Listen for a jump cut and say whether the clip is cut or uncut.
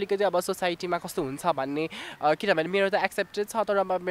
uncut